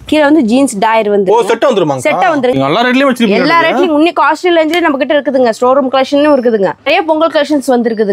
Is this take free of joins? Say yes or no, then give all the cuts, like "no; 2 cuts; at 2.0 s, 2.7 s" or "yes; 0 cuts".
no; 2 cuts; at 2.5 s, 6.8 s